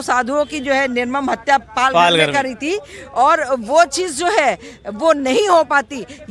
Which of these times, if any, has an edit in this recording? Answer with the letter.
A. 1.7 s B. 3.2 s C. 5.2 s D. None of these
D